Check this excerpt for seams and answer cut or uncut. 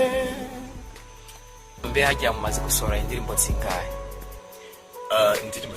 cut